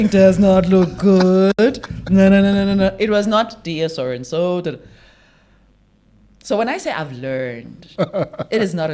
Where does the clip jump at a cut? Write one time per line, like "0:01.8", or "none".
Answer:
none